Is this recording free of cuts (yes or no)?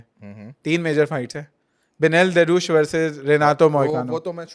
yes